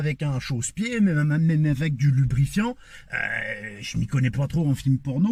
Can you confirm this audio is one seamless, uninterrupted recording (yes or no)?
yes